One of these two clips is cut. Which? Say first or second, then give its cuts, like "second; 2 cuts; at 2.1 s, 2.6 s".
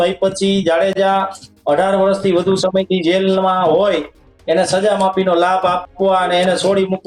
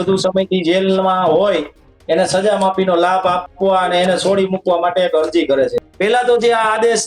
second; 1 cut; at 5.9 s